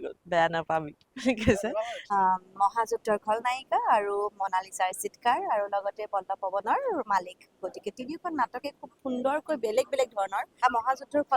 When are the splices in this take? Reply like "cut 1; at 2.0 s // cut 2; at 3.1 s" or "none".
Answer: cut 1; at 2.0 s // cut 2; at 10.5 s

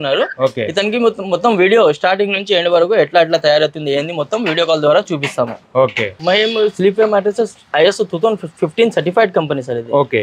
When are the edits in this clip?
cut 1; at 6.1 s

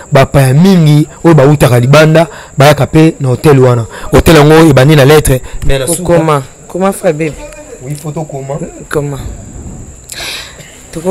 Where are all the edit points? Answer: none

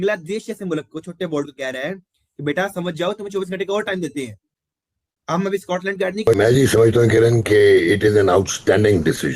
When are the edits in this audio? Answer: cut 1; at 6.3 s

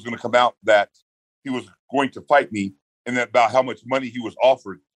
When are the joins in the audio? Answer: cut 1; at 2.8 s

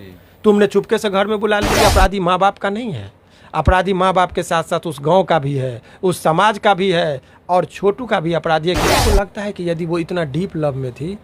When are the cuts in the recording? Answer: cut 1; at 1.7 s // cut 2; at 8.8 s

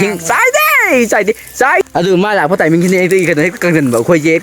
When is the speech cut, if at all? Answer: cut 1; at 1.8 s

